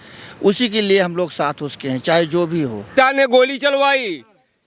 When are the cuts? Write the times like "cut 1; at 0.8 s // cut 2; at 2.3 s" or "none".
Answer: cut 1; at 2.9 s